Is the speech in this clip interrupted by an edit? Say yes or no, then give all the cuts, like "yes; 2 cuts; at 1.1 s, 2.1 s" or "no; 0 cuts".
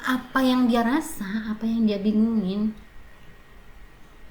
no; 0 cuts